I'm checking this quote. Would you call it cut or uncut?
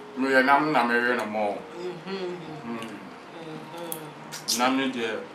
uncut